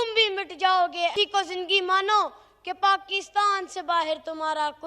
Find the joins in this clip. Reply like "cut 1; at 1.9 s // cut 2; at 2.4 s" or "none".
cut 1; at 1.1 s